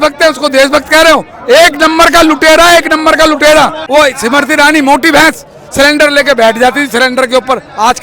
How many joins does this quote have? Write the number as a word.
one